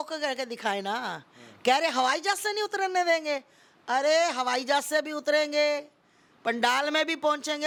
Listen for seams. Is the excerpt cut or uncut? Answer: uncut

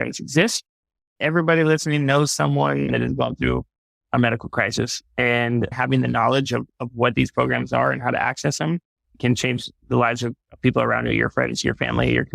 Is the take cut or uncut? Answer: cut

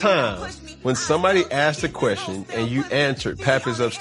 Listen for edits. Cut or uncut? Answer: uncut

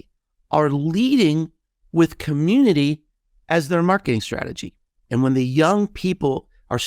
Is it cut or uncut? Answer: cut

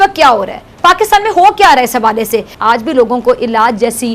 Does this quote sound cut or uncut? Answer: cut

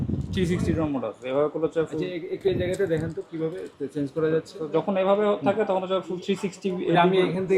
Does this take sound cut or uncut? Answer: uncut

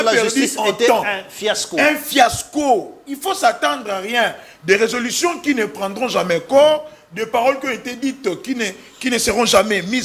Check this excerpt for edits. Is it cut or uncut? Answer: uncut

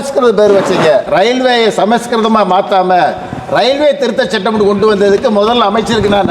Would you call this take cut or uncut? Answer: cut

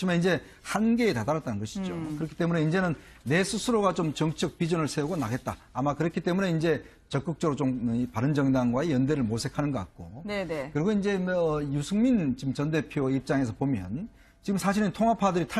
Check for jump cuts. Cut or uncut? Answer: cut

